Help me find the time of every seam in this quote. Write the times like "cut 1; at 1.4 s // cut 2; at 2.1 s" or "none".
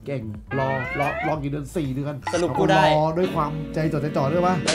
none